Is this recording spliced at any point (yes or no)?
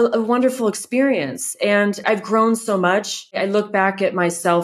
yes